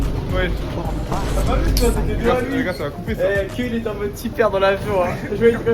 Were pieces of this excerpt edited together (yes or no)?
no